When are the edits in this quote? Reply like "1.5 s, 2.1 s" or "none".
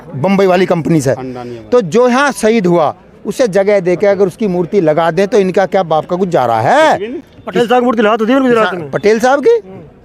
none